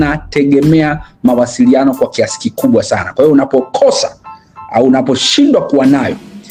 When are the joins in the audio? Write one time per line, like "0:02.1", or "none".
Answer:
none